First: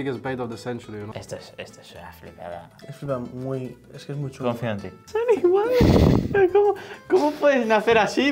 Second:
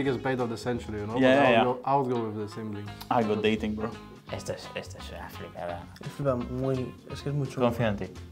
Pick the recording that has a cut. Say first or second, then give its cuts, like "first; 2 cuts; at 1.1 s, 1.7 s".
first; 2 cuts; at 1.0 s, 5.0 s